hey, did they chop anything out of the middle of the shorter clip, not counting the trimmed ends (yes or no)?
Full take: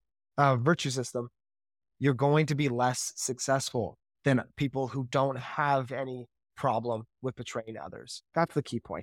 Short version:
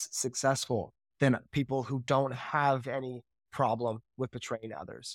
no